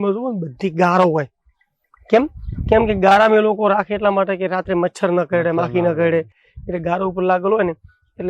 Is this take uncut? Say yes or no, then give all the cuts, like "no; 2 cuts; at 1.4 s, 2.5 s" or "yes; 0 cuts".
yes; 0 cuts